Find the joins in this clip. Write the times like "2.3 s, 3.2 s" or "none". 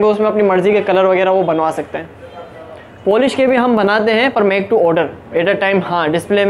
none

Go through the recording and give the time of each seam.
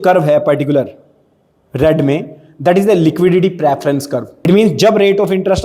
4.3 s

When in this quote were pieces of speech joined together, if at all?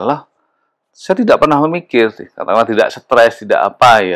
none

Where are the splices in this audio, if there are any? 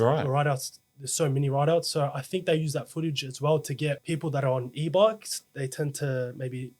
4.0 s

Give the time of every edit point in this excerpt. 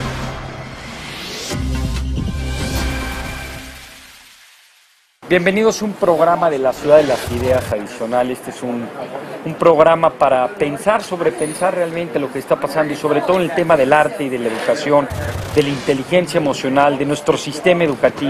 7.6 s

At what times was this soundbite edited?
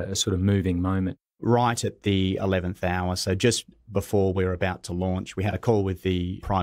1.3 s

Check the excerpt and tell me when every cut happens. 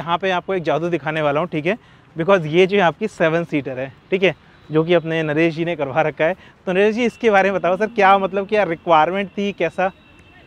none

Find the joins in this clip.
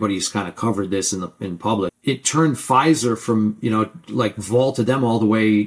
1.9 s

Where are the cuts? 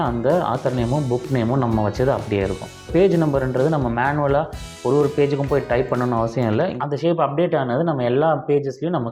2.9 s, 6.7 s

